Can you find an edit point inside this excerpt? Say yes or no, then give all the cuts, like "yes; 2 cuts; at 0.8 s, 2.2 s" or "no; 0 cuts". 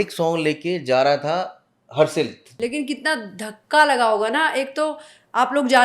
yes; 1 cut; at 2.4 s